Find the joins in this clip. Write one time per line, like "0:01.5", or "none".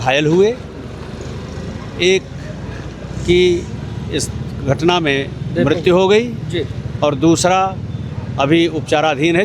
none